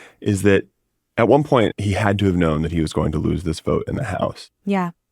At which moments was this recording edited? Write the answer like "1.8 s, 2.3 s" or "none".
1.7 s

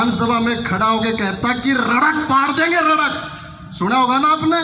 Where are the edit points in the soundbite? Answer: none

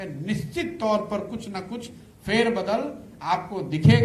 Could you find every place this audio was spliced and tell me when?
none

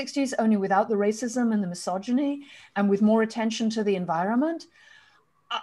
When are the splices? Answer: none

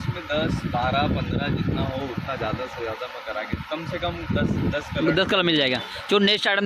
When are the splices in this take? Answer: none

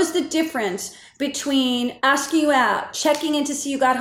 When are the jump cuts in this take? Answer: 2.9 s

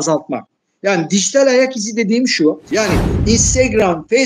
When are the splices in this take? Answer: 2.6 s

